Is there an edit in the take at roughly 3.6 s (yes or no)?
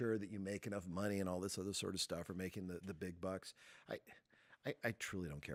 no